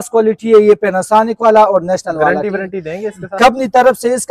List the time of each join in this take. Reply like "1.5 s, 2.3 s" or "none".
none